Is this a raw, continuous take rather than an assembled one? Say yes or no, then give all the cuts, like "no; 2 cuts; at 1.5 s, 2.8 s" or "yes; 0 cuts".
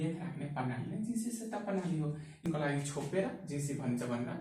no; 1 cut; at 2.4 s